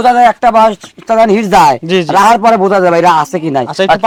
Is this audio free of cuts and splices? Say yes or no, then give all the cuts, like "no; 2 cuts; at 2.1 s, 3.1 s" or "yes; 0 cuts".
yes; 0 cuts